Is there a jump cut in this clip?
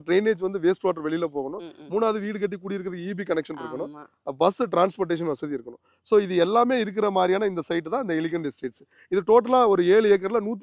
no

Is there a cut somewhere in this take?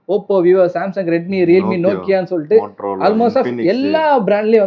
no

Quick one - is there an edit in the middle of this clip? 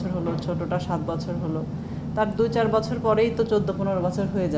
no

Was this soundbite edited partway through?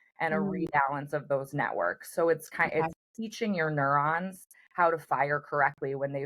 no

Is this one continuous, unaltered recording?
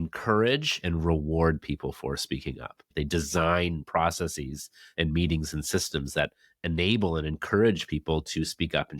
no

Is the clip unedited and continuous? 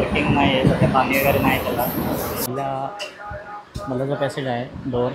no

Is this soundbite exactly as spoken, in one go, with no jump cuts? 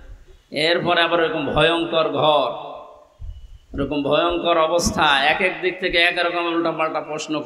yes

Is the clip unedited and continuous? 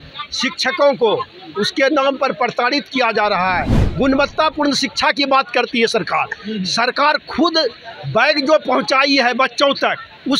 no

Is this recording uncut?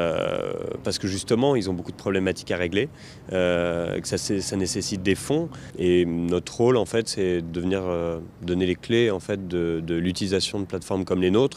no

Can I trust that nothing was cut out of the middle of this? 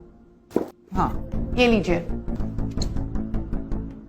no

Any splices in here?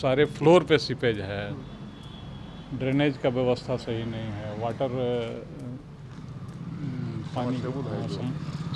no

